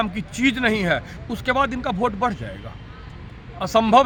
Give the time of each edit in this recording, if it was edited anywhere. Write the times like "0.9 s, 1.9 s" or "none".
none